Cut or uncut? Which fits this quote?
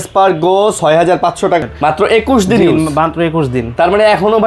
cut